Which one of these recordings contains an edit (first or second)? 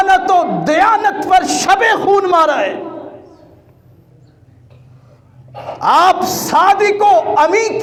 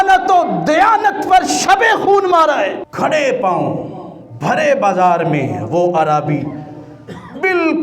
second